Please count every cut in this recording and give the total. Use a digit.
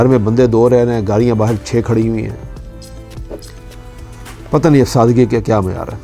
1